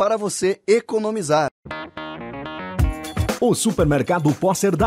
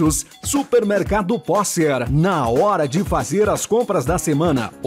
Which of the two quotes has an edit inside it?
first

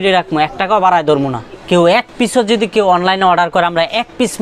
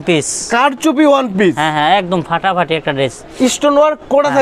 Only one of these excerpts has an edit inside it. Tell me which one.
first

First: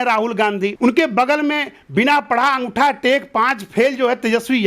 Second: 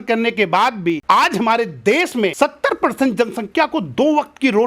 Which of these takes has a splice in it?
second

